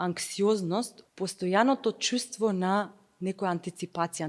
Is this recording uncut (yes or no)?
no